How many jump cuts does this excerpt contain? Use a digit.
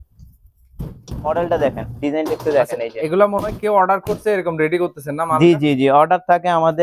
0